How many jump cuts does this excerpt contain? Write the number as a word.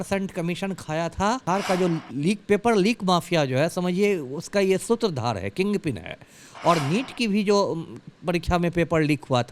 one